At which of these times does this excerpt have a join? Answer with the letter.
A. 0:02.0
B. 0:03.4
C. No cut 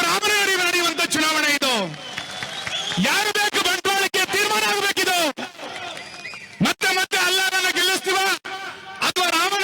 A